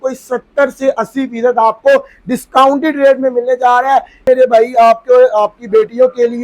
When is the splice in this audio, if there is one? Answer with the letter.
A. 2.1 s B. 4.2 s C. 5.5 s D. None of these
B